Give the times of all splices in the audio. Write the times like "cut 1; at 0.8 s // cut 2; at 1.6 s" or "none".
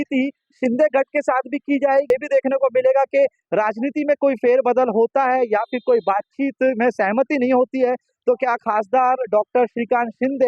cut 1; at 2.1 s